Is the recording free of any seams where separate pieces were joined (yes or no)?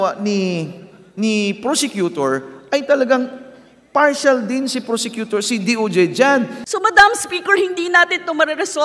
no